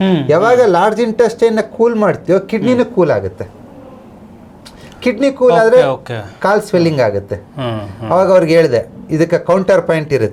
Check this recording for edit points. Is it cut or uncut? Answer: uncut